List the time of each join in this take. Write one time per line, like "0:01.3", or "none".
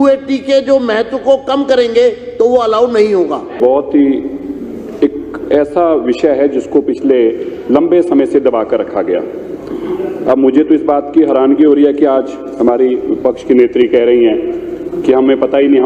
0:03.5

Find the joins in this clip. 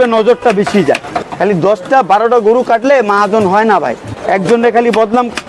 0:01.2
0:04.2

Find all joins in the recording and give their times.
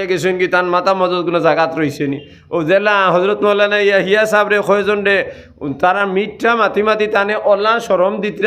none

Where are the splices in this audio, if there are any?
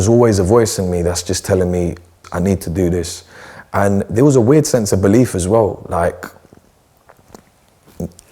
0:02.2

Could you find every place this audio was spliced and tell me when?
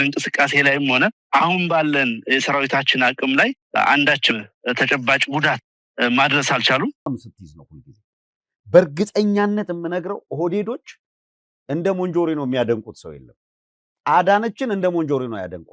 0:07.1

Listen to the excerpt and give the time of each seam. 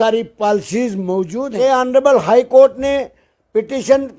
0:01.3

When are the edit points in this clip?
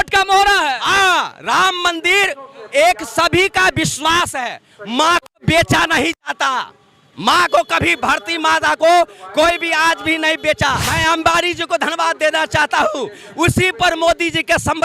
0:10.9

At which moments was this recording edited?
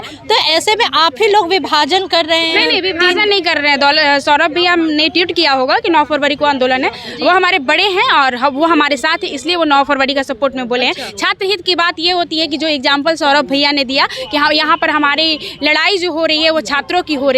none

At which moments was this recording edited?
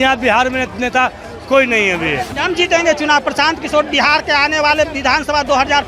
0:02.4

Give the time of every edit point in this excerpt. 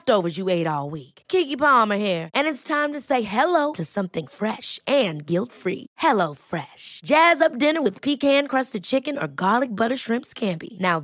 none

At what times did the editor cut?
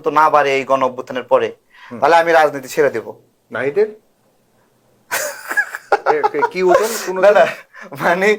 none

